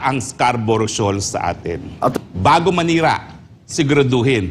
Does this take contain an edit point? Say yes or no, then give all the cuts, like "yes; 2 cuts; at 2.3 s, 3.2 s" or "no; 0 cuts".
yes; 1 cut; at 2.1 s